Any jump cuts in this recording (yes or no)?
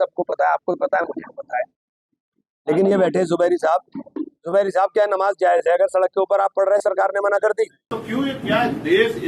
yes